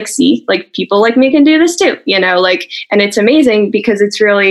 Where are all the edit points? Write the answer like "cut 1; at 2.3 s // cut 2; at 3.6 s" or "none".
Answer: none